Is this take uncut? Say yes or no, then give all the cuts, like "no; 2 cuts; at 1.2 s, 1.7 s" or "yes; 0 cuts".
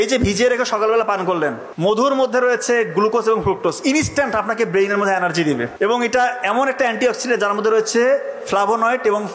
no; 2 cuts; at 1.7 s, 5.7 s